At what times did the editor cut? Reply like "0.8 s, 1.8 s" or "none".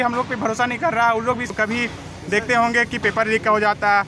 1.5 s